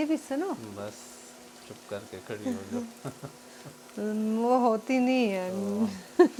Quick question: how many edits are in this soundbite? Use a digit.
0